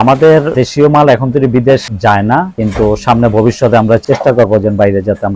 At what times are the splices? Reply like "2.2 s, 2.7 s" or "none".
4.0 s